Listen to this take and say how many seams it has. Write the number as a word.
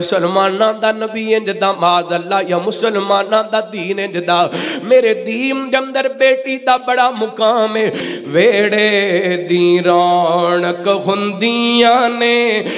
one